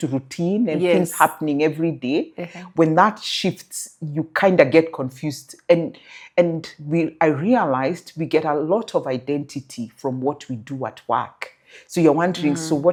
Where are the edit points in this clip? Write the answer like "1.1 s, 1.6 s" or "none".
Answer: none